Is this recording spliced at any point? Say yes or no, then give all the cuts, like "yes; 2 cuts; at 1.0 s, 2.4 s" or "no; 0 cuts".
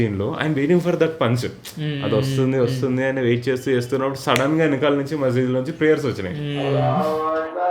yes; 1 cut; at 6.7 s